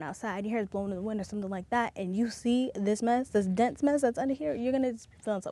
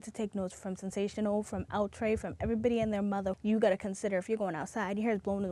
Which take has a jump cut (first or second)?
second